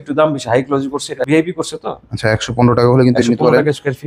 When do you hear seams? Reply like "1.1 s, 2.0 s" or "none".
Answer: 1.3 s